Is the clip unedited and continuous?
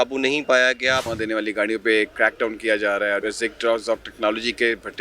no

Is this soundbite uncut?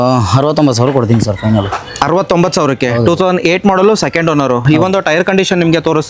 yes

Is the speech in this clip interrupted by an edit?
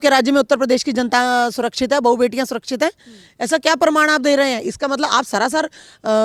no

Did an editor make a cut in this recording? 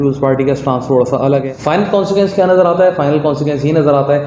yes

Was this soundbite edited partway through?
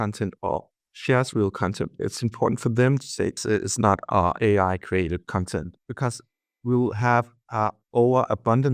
yes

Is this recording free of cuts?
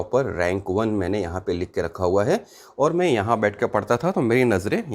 yes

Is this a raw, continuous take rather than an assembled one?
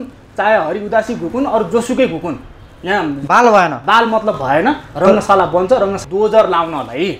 no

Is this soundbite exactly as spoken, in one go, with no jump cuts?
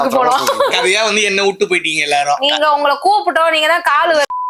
yes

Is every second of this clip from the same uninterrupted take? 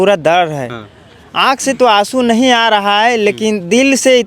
yes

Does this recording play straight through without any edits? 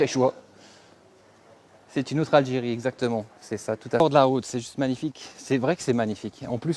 no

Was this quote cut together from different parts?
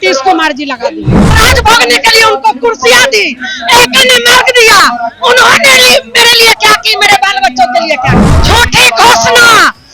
yes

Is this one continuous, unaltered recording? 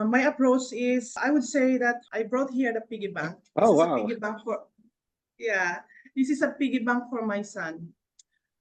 no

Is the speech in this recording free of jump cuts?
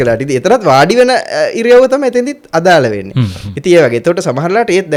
yes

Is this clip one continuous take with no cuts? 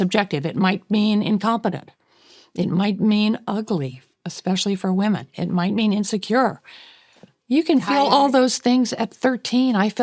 yes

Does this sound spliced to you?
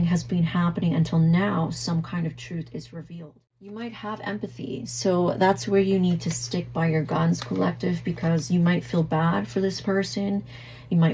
yes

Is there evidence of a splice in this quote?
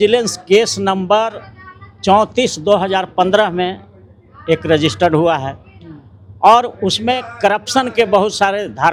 no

